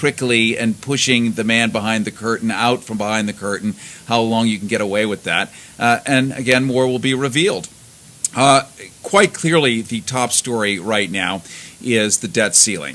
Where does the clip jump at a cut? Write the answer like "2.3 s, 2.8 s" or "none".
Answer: 6.4 s